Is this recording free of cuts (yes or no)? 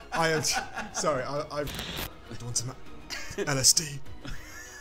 no